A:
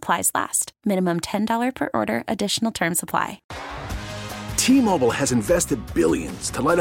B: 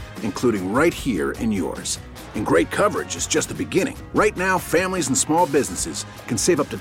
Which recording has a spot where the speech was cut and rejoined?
A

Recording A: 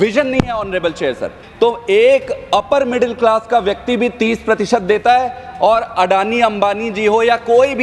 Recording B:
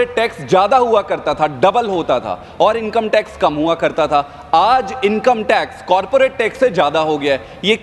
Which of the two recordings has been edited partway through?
A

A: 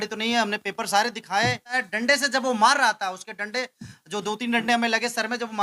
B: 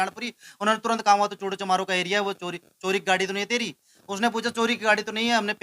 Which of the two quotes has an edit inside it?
A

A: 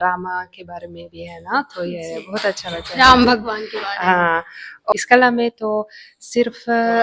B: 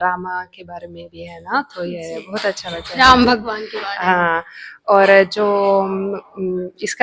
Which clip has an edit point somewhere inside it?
A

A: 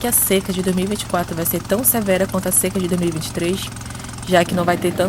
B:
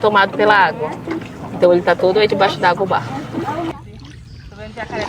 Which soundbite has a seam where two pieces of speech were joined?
B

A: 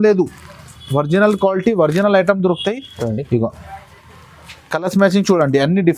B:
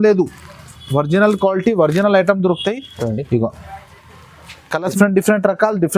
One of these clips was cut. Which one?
B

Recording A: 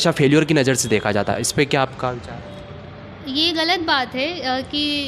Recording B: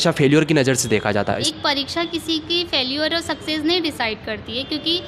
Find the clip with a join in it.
B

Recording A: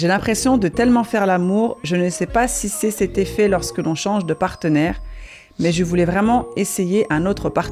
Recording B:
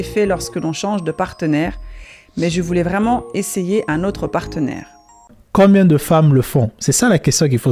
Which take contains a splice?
B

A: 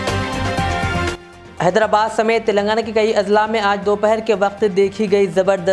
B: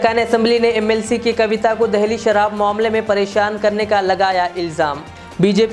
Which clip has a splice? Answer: A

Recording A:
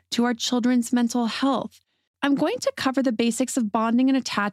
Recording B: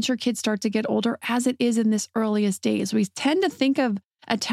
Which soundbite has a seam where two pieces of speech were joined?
A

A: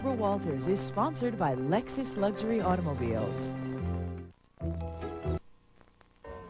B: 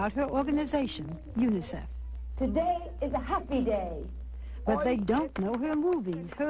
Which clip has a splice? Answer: A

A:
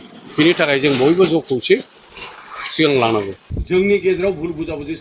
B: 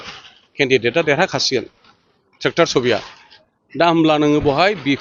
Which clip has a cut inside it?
A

